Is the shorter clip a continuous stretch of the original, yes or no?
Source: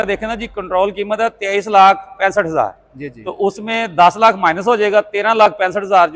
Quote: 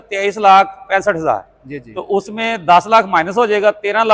yes